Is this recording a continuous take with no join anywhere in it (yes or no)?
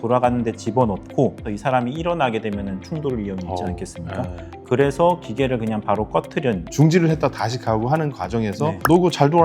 no